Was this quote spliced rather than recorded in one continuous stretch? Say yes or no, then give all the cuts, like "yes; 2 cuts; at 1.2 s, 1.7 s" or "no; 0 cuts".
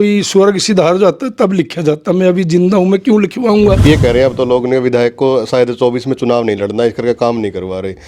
yes; 1 cut; at 3.8 s